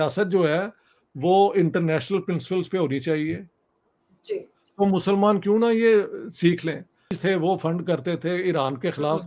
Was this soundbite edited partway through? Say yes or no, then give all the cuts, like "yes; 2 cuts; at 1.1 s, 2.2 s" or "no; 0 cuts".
yes; 1 cut; at 7.2 s